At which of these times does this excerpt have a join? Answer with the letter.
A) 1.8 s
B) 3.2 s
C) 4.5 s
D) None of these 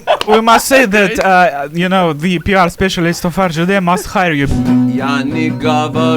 C